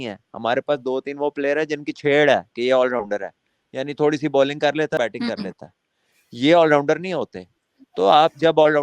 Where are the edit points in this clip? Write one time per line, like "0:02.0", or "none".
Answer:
0:05.0